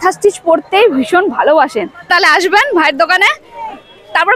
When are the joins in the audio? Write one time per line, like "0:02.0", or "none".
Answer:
0:02.1